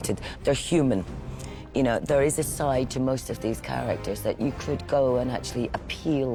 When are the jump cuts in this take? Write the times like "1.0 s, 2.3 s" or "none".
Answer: none

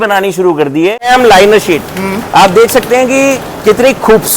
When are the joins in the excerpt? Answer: 1.1 s

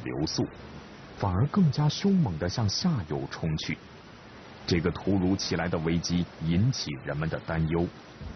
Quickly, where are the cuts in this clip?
none

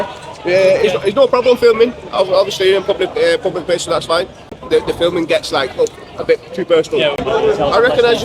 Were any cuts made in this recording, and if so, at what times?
4.4 s, 7.2 s

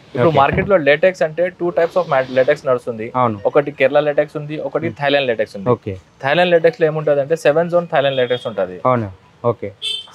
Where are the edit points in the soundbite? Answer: none

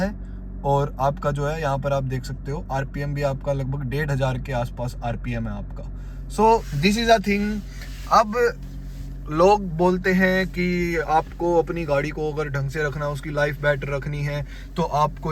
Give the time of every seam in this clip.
none

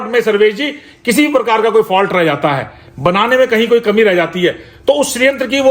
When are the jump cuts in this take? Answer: none

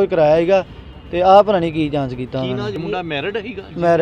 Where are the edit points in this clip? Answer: 2.7 s

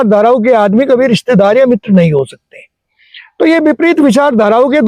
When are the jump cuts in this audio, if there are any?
none

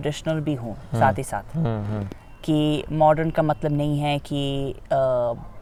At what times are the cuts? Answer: none

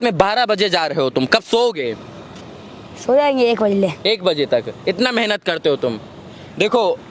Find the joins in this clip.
none

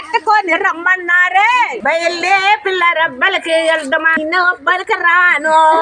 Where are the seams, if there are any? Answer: 1.8 s, 4.2 s

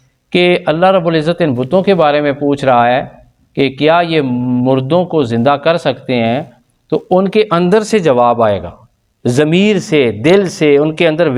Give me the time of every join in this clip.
none

